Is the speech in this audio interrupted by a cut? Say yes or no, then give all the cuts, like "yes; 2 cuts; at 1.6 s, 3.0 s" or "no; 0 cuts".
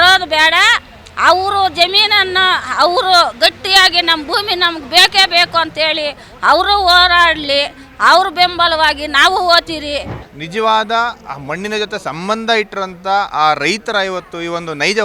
yes; 1 cut; at 10.2 s